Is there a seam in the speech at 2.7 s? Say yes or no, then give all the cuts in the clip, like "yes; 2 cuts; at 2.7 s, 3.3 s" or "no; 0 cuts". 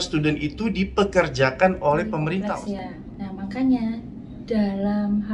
yes; 1 cut; at 2.7 s